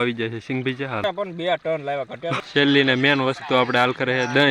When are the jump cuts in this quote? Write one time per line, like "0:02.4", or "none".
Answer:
0:01.0
0:02.4